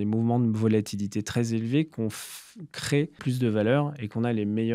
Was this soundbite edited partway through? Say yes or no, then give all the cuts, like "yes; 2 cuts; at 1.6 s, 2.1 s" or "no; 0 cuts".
yes; 1 cut; at 3.2 s